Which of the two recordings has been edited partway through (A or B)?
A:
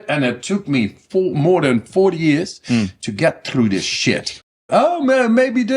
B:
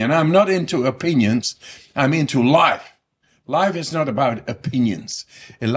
A